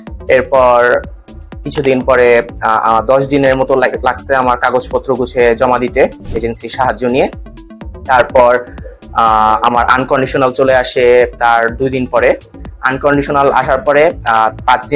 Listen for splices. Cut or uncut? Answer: uncut